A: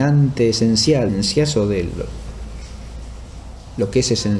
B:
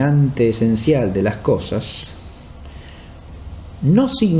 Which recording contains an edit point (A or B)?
B